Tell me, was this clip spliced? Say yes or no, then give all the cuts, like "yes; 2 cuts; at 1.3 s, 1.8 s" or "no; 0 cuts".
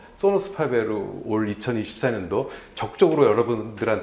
no; 0 cuts